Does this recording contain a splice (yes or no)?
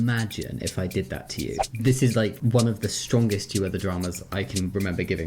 yes